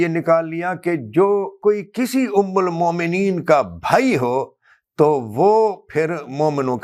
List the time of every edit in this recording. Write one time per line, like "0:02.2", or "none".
0:01.6